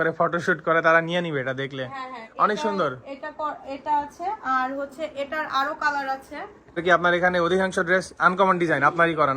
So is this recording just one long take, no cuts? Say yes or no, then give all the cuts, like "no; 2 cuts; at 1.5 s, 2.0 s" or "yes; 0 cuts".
no; 1 cut; at 6.8 s